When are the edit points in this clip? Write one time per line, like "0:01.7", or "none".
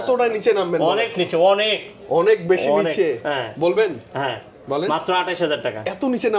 none